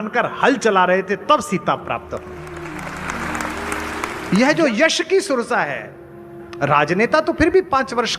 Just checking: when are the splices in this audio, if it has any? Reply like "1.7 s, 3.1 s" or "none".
4.2 s

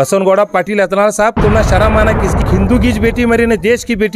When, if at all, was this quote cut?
2.4 s

